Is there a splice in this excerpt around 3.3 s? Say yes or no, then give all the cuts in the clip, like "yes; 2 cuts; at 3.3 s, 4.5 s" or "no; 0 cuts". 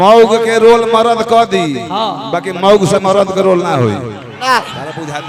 no; 0 cuts